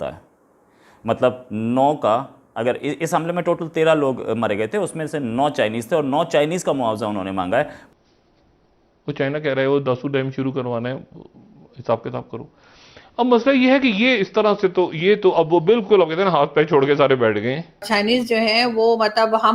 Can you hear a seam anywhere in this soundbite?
yes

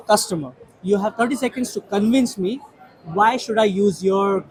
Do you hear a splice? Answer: no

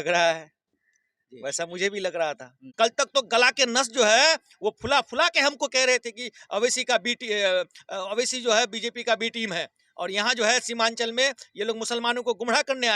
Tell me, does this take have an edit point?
yes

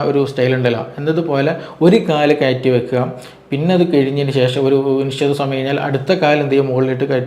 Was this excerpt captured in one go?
yes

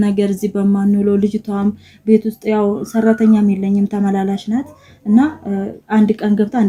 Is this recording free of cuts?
yes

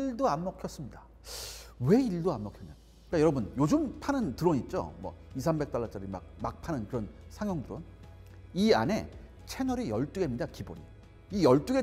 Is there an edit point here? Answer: no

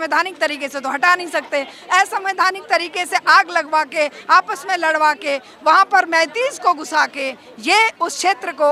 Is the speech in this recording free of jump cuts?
yes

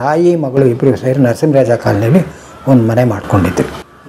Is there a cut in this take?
no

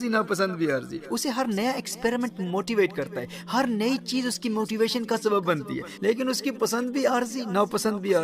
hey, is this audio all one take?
yes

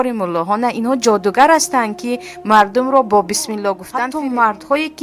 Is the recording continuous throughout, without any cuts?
no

